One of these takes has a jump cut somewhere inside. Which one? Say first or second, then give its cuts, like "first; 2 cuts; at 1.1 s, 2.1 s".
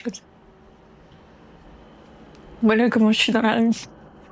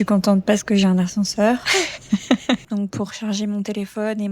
second; 2 cuts; at 1.6 s, 2.6 s